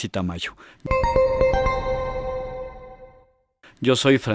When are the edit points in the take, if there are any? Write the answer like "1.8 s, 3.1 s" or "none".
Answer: 1.5 s